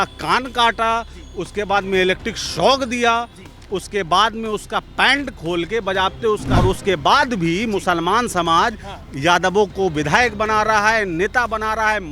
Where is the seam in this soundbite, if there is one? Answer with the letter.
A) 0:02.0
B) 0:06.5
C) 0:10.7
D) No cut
B